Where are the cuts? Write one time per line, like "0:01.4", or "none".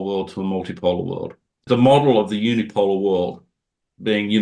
0:01.6